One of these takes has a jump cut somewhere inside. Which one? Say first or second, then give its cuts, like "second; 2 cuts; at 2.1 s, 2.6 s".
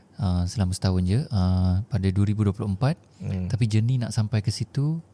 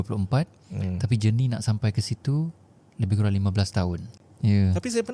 second; 1 cut; at 4.2 s